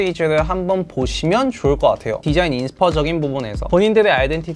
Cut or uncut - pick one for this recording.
cut